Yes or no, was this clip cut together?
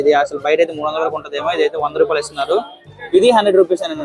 yes